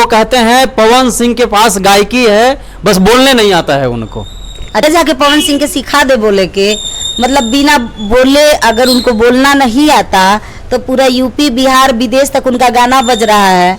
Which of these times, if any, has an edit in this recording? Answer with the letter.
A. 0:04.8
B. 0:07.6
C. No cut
A